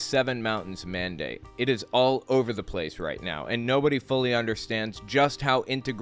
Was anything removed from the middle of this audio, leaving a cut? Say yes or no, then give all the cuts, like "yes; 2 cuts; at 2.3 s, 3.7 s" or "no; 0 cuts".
no; 0 cuts